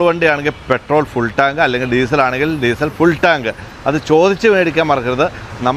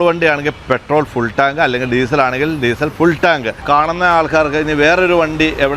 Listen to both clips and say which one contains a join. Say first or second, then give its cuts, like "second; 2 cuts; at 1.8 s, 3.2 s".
second; 1 cut; at 3.6 s